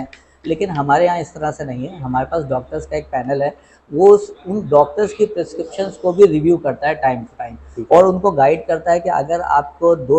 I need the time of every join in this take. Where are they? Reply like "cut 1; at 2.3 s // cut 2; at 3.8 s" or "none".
none